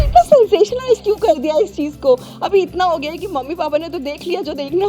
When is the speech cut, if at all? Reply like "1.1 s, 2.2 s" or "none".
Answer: none